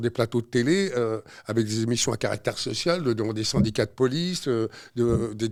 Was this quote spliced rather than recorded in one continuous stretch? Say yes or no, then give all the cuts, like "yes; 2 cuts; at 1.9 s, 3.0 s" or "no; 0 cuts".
no; 0 cuts